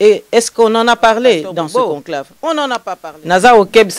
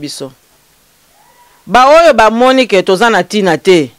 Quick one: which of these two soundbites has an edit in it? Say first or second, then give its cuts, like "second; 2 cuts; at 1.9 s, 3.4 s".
first; 1 cut; at 3.0 s